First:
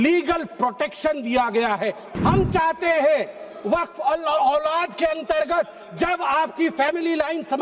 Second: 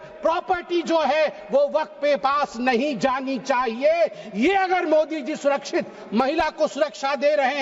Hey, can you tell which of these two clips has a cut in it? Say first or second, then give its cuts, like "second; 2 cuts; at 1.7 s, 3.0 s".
first; 1 cut; at 2.1 s